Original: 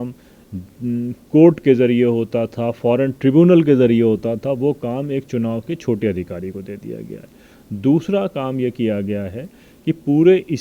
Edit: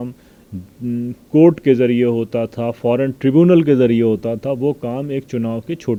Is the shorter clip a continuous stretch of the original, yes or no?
yes